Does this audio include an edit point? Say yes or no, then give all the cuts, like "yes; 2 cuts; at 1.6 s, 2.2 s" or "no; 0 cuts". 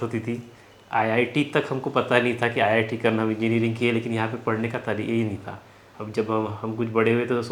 no; 0 cuts